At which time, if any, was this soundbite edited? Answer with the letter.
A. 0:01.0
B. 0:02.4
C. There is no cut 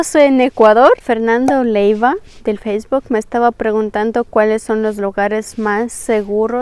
A